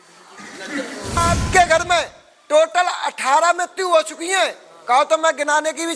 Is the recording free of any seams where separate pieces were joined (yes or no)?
no